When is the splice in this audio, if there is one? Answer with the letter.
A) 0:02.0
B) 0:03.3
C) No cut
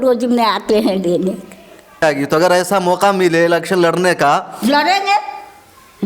A